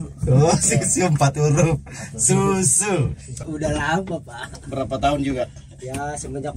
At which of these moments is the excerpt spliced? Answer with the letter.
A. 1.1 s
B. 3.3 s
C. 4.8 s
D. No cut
B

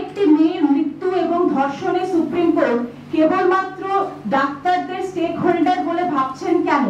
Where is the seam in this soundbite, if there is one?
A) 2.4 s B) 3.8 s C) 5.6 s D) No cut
D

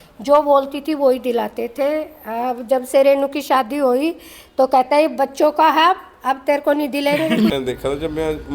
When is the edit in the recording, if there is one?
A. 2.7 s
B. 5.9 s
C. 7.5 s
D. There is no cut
C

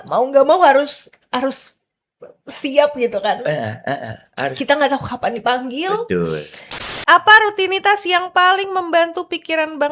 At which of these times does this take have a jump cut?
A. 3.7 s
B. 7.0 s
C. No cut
B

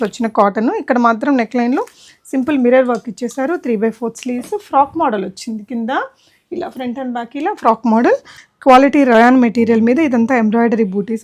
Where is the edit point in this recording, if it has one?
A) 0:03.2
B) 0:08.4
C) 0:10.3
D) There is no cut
B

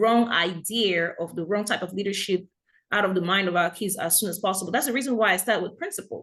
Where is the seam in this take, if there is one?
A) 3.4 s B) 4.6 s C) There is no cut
C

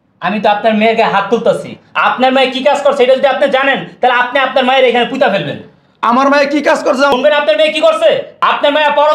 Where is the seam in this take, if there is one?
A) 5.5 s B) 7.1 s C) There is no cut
B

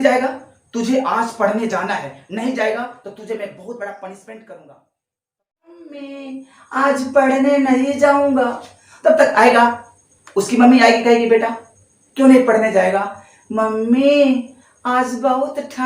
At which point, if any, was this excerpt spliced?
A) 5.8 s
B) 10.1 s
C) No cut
A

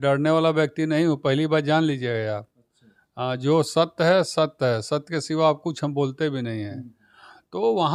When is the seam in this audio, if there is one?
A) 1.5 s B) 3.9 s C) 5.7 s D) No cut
D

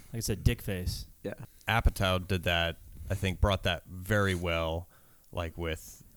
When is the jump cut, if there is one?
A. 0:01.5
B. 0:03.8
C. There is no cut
A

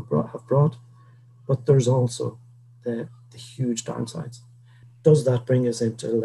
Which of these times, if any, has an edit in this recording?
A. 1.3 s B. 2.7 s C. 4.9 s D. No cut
C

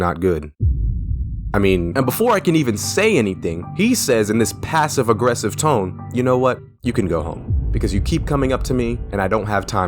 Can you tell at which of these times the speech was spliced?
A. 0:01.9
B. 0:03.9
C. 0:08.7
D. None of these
A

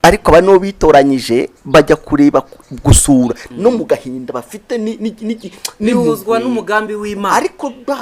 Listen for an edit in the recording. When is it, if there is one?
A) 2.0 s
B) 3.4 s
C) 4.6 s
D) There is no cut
B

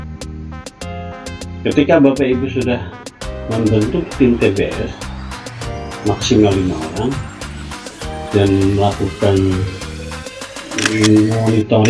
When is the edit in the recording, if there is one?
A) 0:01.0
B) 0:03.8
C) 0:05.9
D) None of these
A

